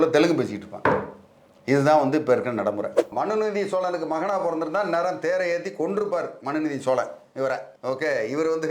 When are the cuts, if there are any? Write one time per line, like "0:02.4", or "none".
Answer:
0:03.1